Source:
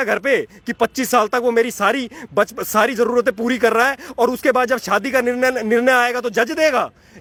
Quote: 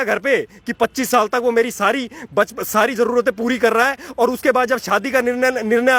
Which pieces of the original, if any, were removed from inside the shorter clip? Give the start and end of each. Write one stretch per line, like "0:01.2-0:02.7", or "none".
none